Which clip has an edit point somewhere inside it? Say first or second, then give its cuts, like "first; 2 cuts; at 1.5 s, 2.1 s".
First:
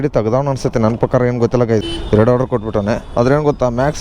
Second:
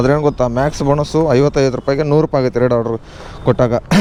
first; 1 cut; at 1.8 s